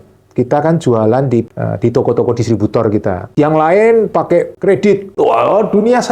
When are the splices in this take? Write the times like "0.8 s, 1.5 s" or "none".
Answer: 1.6 s

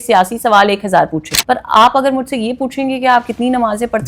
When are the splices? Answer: 1.3 s

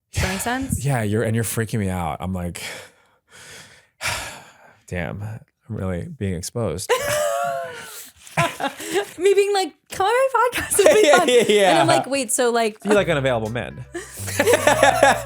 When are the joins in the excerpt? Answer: 9.1 s, 12.8 s

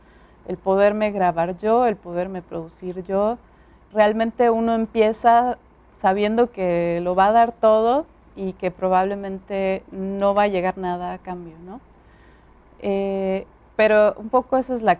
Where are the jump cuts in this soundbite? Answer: 3.9 s

